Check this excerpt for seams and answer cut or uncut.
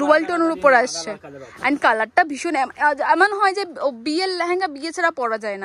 uncut